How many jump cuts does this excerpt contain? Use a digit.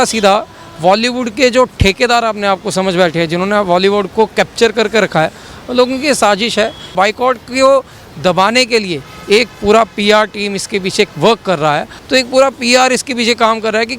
2